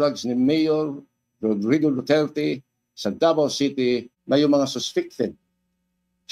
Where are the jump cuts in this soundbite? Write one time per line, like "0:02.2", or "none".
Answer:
0:04.1

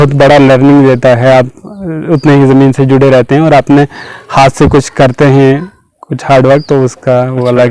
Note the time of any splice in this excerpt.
none

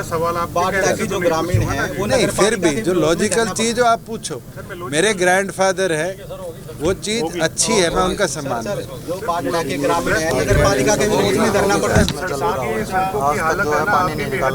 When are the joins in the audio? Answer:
0:12.1

